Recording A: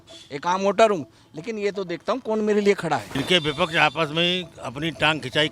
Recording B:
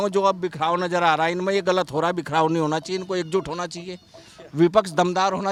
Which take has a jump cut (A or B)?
A